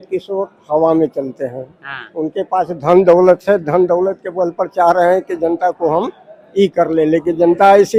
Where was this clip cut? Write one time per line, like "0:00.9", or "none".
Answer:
none